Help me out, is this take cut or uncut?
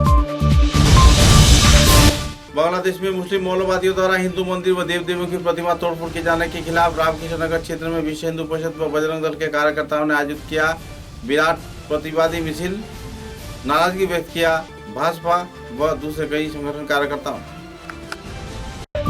uncut